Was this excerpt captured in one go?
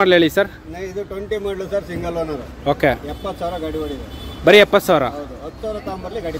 yes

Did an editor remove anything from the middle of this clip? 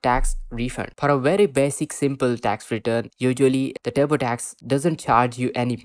yes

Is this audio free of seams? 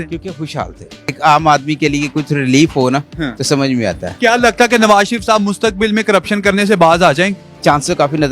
no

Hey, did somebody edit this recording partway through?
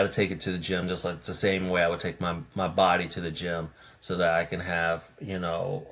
no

